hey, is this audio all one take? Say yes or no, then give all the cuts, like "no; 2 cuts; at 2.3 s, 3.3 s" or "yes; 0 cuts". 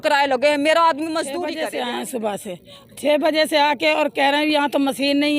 no; 1 cut; at 1.5 s